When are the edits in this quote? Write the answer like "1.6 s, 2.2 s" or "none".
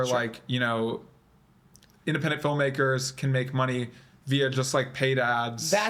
none